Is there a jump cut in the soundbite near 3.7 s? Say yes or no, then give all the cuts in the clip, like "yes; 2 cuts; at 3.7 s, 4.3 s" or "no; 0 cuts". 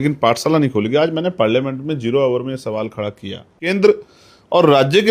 yes; 1 cut; at 3.7 s